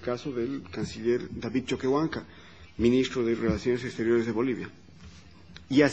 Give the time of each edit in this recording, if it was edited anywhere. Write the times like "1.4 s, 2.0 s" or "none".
2.2 s

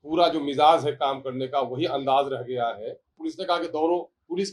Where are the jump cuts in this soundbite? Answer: 3.2 s

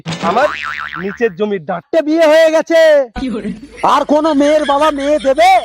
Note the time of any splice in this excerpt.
1.8 s

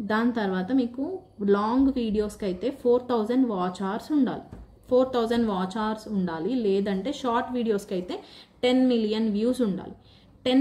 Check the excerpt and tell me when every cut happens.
none

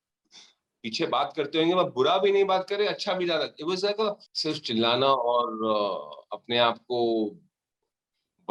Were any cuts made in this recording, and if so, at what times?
4.3 s

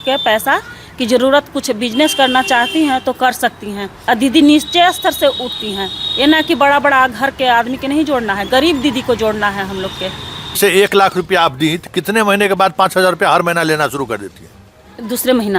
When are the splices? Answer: 3.9 s, 10.6 s

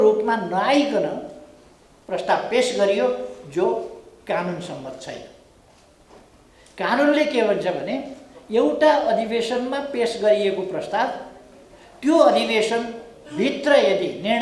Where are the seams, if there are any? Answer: none

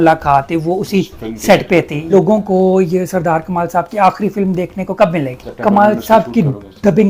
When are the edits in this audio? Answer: 2.1 s, 5.4 s

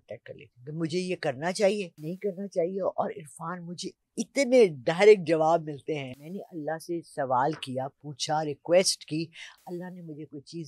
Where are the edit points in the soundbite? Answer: 2.0 s, 6.1 s

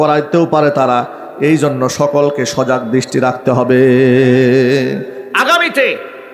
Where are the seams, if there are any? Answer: 5.2 s

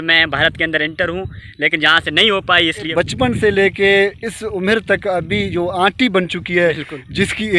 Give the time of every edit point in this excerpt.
2.8 s

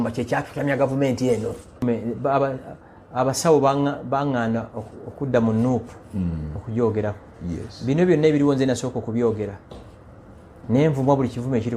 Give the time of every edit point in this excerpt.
1.8 s

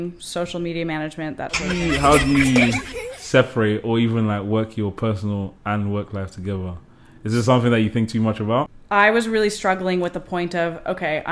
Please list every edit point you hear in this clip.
1.8 s, 8.8 s

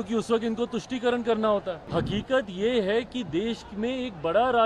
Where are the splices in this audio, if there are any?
1.8 s

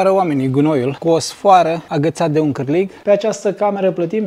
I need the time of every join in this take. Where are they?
2.9 s

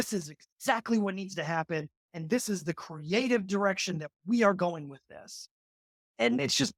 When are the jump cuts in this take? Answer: none

